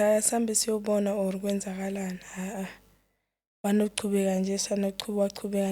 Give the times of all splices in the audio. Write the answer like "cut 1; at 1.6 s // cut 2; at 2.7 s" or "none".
none